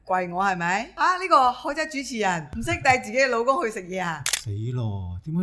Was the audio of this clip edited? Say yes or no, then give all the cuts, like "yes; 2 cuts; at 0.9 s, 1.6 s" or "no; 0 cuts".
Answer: yes; 3 cuts; at 0.9 s, 2.5 s, 4.2 s